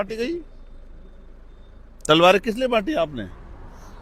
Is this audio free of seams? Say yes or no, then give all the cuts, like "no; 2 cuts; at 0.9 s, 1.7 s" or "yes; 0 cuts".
yes; 0 cuts